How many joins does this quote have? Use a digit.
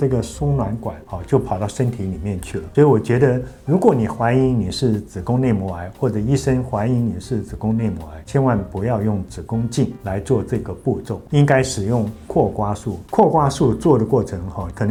0